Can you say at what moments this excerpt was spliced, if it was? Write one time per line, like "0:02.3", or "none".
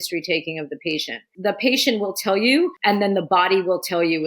0:01.3
0:02.8